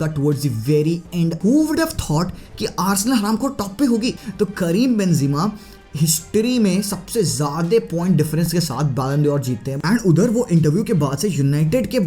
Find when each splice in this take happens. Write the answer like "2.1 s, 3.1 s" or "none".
1.4 s, 4.1 s, 9.7 s